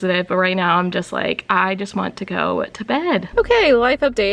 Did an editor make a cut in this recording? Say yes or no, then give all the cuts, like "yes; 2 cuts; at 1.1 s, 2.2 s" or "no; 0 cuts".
no; 0 cuts